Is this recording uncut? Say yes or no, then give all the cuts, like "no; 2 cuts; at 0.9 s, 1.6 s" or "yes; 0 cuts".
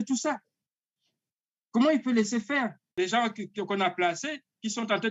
no; 1 cut; at 2.8 s